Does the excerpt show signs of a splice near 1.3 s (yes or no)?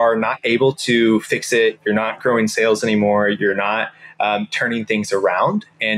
no